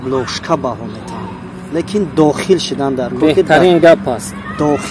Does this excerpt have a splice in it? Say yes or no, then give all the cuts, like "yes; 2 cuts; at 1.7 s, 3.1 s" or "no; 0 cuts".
no; 0 cuts